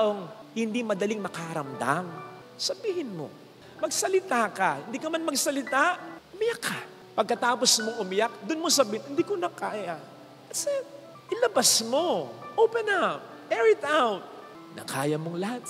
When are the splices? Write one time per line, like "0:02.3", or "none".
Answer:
none